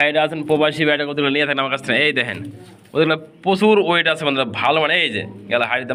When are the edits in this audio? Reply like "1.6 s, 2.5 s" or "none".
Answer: none

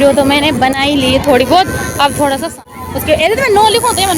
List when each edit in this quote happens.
2.7 s

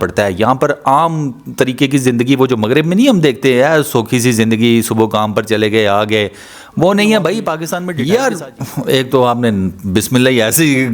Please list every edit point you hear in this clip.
7.6 s

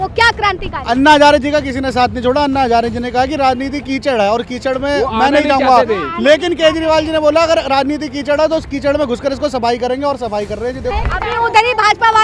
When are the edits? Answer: 10.9 s

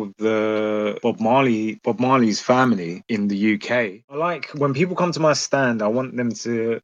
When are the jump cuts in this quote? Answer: 4.0 s

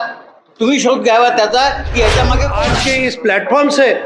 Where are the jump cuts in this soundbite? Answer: 2.6 s

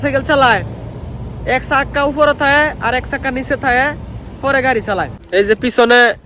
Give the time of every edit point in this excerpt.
5.2 s

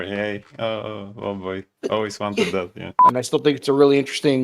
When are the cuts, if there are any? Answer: 3.0 s

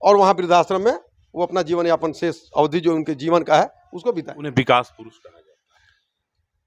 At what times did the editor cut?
none

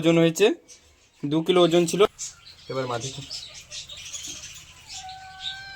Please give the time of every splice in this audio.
2.1 s

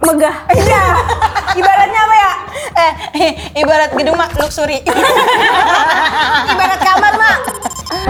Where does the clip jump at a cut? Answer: none

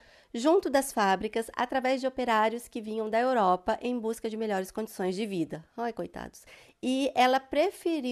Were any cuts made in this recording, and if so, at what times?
6.5 s

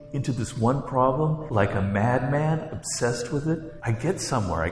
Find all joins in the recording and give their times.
1.4 s, 3.8 s

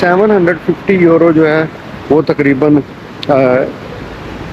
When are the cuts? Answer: none

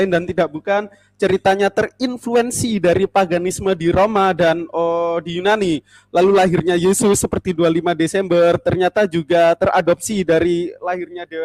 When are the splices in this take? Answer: none

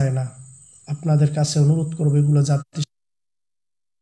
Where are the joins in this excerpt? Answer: none

